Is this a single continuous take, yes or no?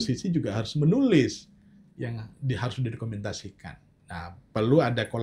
yes